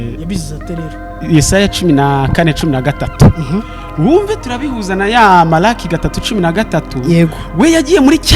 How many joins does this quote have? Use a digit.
0